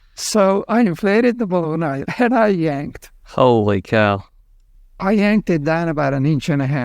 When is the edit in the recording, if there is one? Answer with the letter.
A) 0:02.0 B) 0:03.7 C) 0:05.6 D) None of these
A